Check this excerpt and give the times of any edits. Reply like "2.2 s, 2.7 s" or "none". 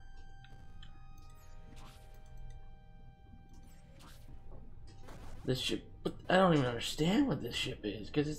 4.3 s